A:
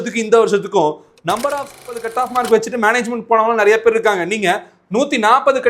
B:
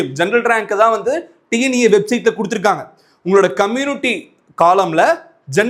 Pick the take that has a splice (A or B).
A